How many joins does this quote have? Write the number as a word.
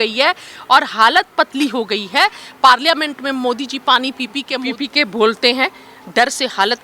one